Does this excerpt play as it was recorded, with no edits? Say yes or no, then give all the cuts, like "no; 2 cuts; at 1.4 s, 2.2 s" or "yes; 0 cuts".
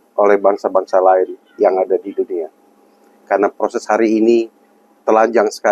yes; 0 cuts